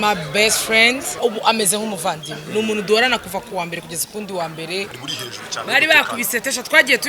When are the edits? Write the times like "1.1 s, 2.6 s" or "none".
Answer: 1.2 s, 5.0 s